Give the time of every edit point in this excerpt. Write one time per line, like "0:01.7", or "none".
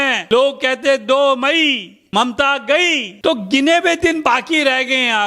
none